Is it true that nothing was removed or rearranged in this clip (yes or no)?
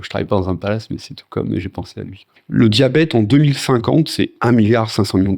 no